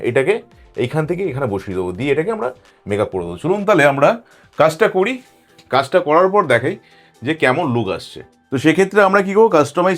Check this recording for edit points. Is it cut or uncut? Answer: uncut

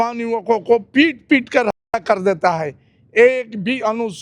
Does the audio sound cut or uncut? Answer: uncut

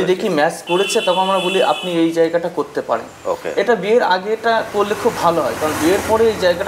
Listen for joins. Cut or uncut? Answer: uncut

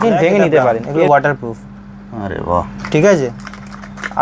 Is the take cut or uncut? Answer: cut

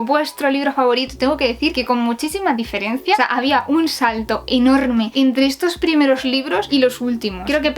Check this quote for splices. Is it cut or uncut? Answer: uncut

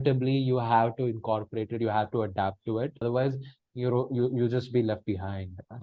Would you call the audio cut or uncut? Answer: uncut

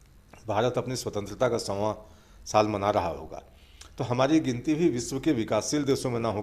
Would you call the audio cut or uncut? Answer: uncut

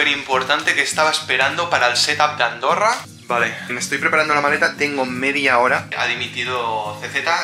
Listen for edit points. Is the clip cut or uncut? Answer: cut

